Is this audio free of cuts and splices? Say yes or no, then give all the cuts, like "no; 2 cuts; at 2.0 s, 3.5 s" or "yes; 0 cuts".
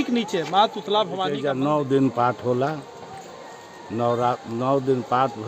no; 1 cut; at 1.3 s